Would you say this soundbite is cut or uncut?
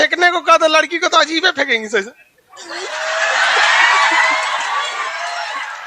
uncut